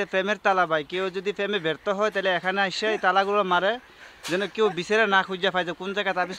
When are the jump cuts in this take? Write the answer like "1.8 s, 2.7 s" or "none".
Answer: none